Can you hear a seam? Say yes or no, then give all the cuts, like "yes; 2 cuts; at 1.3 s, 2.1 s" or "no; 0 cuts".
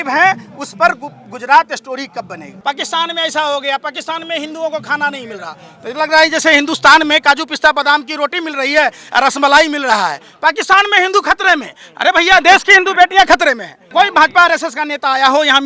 yes; 2 cuts; at 2.5 s, 13.7 s